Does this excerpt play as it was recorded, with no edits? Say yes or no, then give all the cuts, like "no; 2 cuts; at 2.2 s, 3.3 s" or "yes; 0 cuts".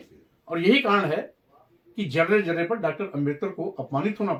yes; 0 cuts